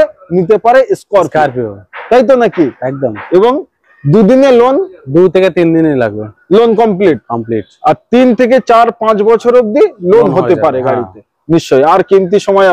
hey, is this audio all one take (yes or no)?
yes